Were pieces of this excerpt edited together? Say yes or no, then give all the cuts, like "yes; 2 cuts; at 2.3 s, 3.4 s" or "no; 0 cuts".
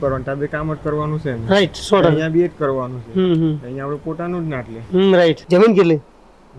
yes; 1 cut; at 5.4 s